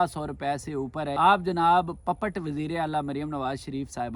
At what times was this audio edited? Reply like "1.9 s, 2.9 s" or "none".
1.1 s